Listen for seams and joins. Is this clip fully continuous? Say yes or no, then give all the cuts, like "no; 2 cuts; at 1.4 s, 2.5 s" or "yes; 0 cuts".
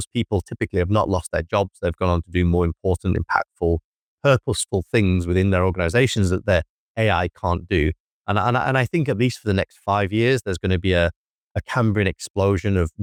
yes; 0 cuts